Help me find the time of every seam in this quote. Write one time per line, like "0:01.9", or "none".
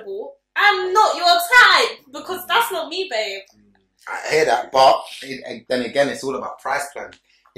none

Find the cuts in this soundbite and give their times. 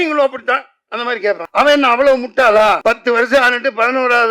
0:01.4
0:02.8

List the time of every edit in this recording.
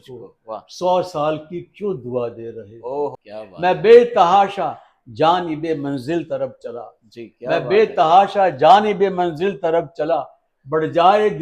0:03.1

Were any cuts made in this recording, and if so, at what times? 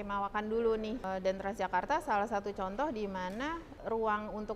0:01.0
0:03.7

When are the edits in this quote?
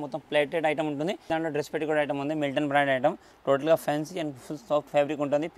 0:01.2

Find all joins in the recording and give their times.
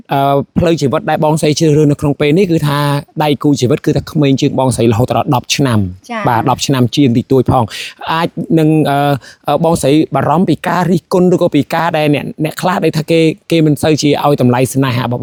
none

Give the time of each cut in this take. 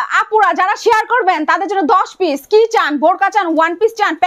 none

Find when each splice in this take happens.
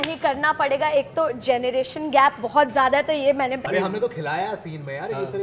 0:03.6

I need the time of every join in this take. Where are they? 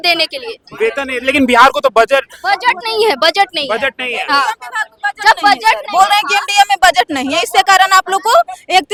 none

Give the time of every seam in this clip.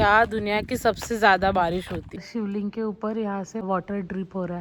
0:02.2
0:03.6

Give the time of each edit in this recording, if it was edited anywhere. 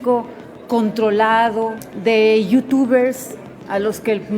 0:01.8

